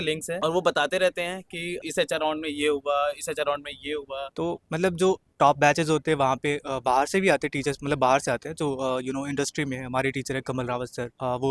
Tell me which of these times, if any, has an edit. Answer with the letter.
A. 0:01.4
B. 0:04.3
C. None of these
B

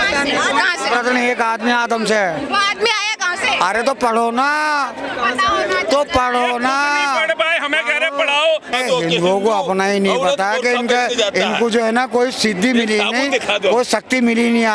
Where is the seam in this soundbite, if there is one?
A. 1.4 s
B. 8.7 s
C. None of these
B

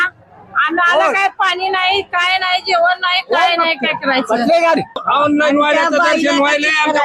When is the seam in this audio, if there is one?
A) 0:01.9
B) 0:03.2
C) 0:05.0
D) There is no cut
C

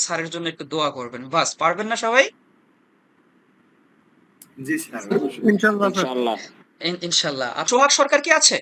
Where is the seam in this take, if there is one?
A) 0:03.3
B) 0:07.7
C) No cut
B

